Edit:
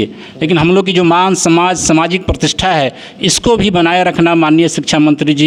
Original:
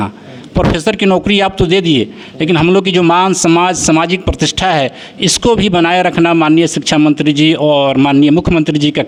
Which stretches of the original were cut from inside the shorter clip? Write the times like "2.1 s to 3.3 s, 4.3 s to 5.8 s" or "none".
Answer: none